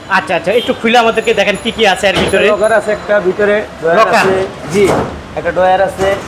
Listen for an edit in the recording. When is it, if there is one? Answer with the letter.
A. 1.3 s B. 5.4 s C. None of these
C